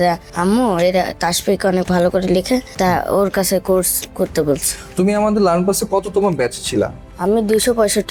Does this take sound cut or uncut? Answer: uncut